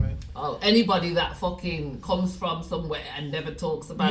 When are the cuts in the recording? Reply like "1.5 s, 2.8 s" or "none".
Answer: none